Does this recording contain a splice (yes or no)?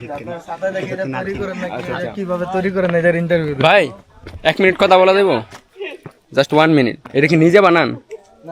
yes